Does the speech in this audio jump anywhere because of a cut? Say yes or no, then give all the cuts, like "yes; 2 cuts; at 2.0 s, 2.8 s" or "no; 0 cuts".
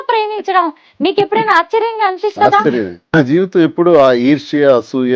yes; 1 cut; at 3.1 s